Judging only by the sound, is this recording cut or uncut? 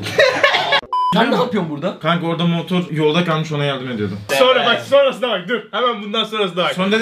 cut